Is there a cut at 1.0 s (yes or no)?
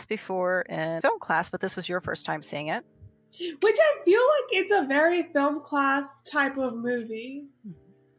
yes